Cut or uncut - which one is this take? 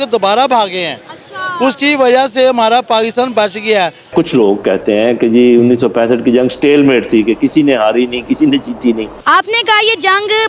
cut